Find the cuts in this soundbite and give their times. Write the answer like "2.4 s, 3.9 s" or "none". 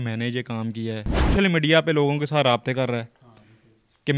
1.3 s